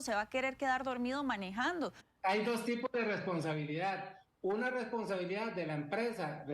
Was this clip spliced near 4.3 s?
no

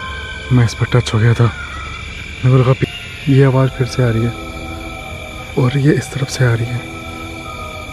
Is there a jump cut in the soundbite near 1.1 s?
no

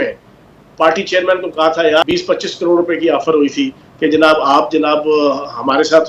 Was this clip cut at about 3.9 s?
no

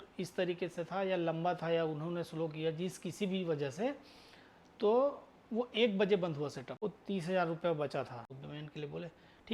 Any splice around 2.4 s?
no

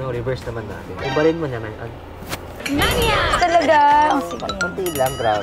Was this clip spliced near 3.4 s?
yes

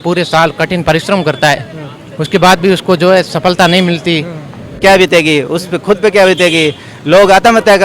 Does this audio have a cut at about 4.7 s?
yes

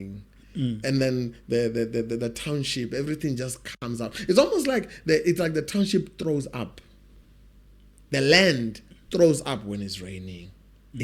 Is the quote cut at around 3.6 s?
no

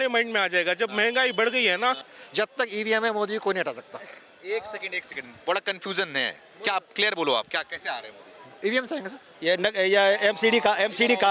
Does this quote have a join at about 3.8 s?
no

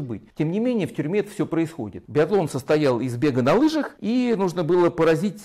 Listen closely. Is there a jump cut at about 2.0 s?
yes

